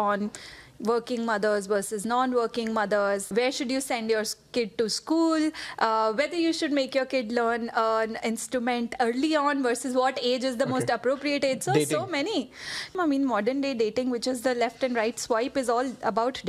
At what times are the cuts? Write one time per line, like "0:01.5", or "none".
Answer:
0:03.2
0:12.9